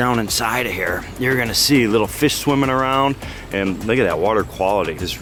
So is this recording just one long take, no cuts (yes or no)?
yes